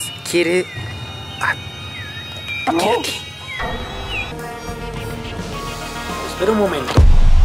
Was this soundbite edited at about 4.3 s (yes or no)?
yes